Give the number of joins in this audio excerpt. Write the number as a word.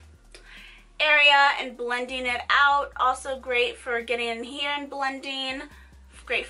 one